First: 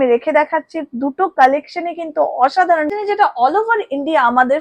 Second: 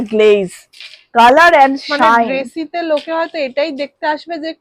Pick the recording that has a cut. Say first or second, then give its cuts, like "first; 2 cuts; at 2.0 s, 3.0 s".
first; 1 cut; at 2.9 s